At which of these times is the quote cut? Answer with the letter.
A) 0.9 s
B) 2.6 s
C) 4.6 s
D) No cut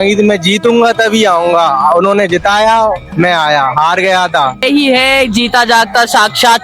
C